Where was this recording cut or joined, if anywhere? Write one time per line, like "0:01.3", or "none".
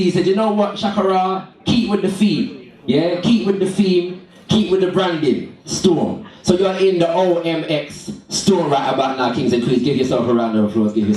0:05.0